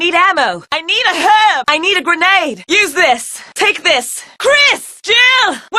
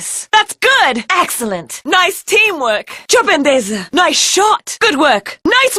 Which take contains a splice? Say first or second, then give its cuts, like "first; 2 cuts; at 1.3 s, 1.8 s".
first; 1 cut; at 2.4 s